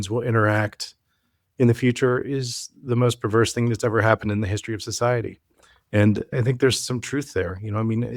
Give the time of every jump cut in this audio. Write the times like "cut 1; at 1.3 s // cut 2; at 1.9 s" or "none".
cut 1; at 6.3 s